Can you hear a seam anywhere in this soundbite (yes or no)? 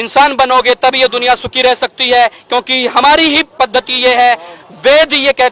no